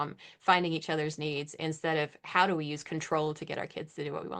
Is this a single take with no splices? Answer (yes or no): yes